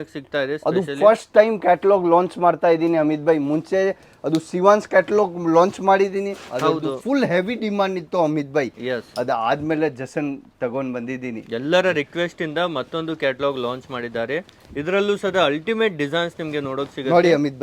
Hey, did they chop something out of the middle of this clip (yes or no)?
no